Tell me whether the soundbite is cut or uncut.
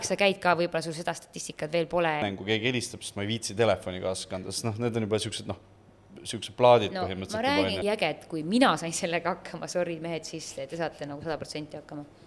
cut